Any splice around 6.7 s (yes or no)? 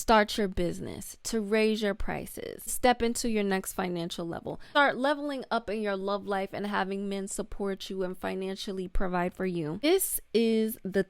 no